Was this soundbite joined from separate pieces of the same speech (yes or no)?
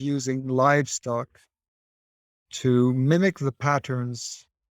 no